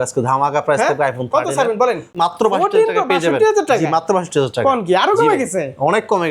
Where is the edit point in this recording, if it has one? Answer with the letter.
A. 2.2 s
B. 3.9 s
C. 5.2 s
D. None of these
A